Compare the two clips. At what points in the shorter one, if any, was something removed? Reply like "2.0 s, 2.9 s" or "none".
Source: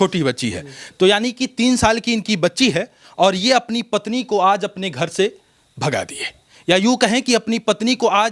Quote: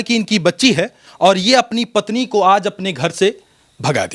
none